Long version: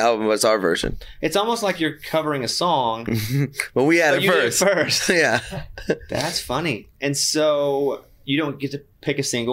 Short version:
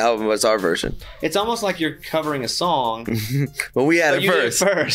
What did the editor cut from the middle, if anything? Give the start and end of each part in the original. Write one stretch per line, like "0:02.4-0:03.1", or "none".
none